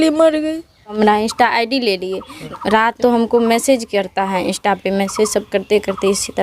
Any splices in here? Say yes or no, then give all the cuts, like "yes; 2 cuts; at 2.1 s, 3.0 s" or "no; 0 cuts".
yes; 2 cuts; at 0.9 s, 2.7 s